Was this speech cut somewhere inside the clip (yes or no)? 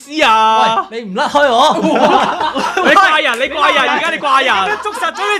no